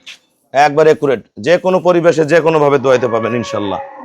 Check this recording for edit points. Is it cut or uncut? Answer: uncut